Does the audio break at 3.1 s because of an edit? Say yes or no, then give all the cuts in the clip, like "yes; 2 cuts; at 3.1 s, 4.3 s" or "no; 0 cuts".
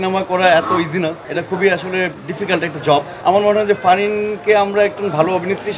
no; 0 cuts